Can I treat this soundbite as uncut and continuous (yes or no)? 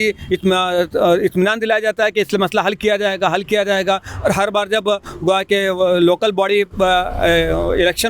yes